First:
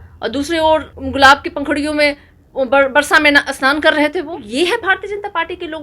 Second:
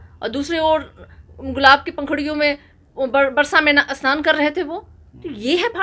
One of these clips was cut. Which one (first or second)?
first